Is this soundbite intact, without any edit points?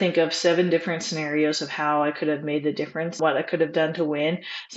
no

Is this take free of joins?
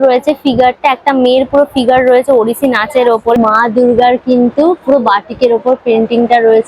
no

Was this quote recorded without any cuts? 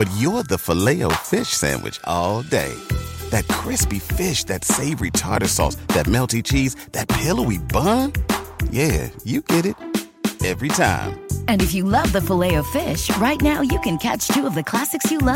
yes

